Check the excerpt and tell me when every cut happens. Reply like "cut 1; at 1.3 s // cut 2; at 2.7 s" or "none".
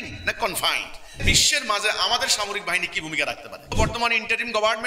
cut 1; at 1.2 s // cut 2; at 3.8 s